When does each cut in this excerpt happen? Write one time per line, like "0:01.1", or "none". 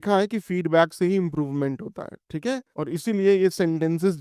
0:02.7